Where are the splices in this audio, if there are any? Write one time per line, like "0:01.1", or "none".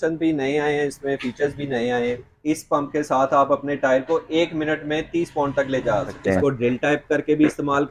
0:02.3
0:06.2